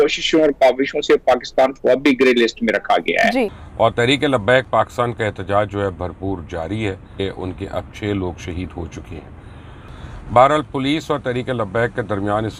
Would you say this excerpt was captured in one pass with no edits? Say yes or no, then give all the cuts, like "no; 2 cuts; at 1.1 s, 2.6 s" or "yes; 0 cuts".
no; 2 cuts; at 3.5 s, 7.2 s